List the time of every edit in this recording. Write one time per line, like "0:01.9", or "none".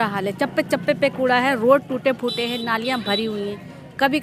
none